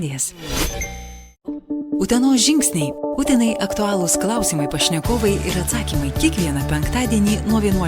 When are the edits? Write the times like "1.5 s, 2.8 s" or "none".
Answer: 1.2 s

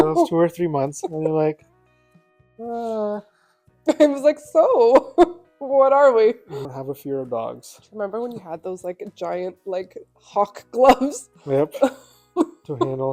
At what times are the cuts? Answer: 3.8 s, 6.5 s

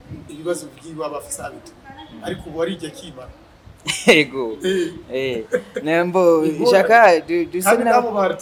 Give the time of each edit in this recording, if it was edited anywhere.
none

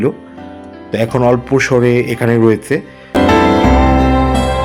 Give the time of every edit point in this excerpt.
3.2 s

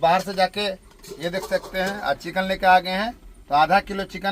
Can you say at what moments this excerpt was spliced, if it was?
none

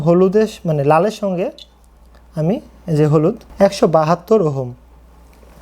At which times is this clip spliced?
3.4 s

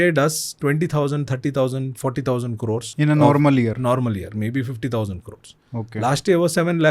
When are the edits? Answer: 2.9 s

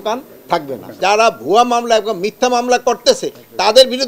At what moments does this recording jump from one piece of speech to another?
1.0 s

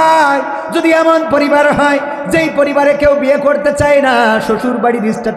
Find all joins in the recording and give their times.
none

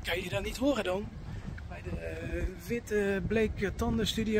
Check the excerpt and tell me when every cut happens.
none

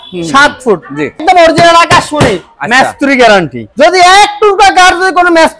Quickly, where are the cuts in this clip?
1.2 s

